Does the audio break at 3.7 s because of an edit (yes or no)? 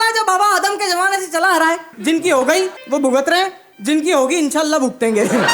yes